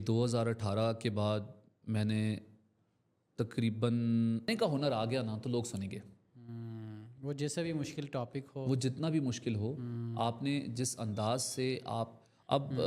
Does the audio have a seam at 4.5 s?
yes; 1 cut; at 4.5 s

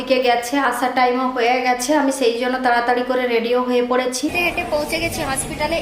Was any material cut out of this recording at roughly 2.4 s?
no; 1 cut; at 4.4 s

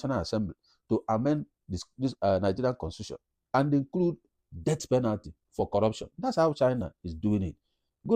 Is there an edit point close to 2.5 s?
no; 0 cuts

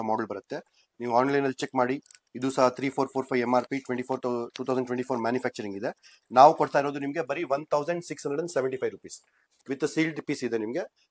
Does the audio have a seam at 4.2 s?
no; 1 cut; at 9.5 s

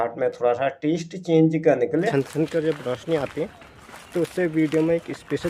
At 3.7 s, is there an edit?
no; 1 cut; at 2.1 s

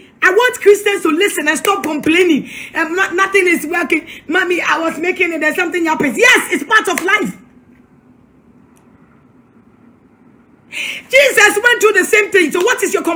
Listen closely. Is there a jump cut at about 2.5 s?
no; 0 cuts

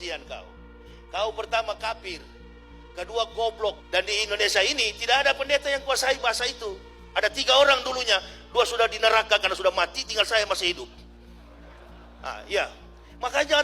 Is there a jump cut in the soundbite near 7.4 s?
no; 1 cut; at 3.8 s

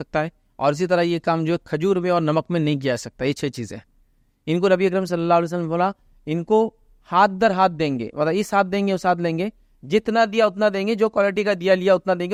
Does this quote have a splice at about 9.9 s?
no; 0 cuts

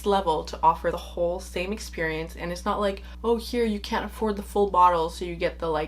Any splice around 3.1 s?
yes; 2 cuts; at 1.0 s, 3.1 s

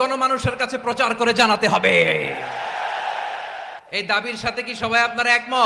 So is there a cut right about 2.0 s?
no; 1 cut; at 3.8 s

